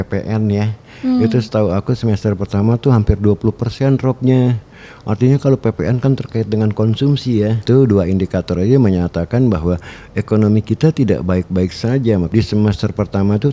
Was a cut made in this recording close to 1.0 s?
no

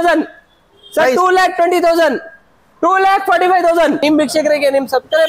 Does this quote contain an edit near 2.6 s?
no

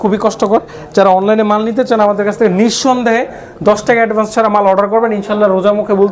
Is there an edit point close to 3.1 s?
no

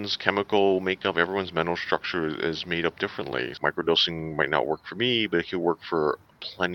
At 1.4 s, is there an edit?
no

